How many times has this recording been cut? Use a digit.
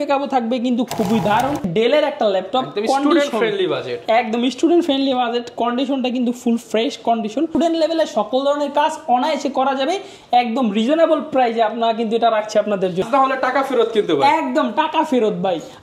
3